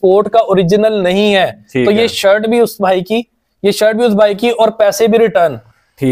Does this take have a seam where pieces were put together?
no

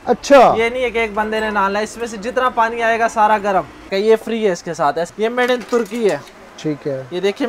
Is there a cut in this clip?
yes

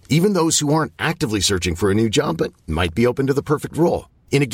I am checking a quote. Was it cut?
no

